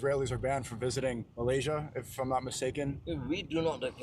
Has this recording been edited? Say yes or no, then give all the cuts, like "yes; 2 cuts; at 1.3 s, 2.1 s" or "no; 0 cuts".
yes; 2 cuts; at 1.3 s, 3.0 s